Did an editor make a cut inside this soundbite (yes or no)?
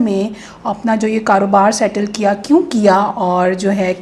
no